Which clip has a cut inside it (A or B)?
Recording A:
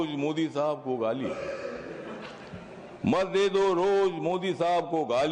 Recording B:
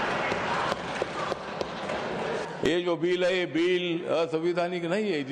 B